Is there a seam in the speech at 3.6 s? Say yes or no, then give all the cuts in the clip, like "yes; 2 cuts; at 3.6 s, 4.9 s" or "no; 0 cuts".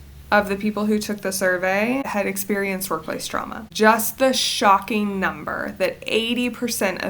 yes; 2 cuts; at 2.1 s, 3.6 s